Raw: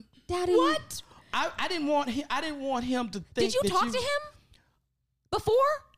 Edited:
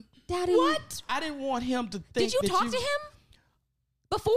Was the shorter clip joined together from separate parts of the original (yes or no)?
yes